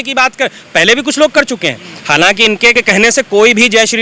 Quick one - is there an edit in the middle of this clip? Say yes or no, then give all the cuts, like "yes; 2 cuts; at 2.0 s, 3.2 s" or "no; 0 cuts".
no; 0 cuts